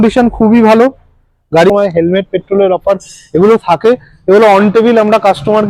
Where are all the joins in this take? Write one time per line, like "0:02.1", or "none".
0:01.7